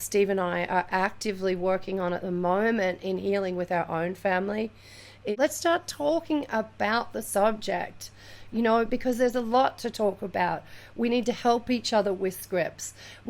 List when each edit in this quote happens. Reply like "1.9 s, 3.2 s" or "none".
5.2 s